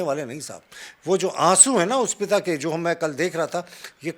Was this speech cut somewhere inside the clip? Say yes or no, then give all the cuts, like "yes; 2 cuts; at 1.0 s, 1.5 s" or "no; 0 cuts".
no; 0 cuts